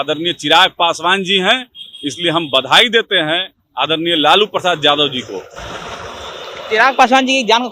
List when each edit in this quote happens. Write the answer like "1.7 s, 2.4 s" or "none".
none